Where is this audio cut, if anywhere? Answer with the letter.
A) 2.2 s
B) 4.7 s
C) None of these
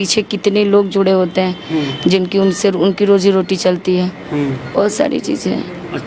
C